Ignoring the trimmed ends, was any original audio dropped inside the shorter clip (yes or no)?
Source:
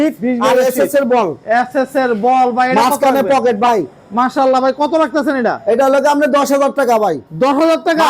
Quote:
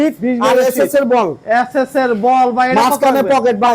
no